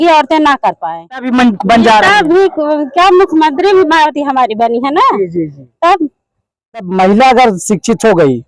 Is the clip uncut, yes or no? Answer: no